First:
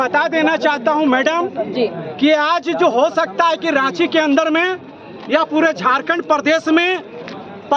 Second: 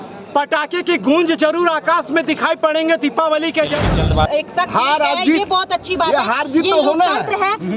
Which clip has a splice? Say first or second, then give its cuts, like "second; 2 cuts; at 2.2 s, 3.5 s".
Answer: second; 1 cut; at 4.1 s